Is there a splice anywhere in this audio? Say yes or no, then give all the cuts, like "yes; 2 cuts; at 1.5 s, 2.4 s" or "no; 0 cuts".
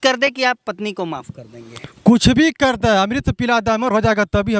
no; 0 cuts